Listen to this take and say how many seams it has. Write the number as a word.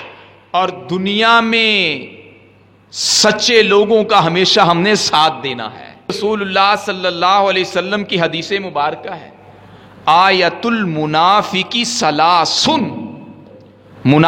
one